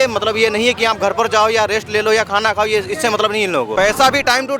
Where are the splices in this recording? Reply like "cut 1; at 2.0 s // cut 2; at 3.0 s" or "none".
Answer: cut 1; at 3.7 s